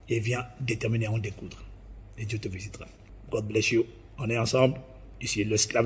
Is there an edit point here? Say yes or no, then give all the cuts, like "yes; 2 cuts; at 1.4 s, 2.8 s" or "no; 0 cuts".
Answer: no; 0 cuts